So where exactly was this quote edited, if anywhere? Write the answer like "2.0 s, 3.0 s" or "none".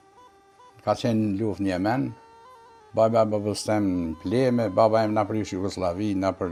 none